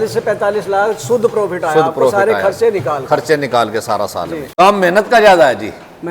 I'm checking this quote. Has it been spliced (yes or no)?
yes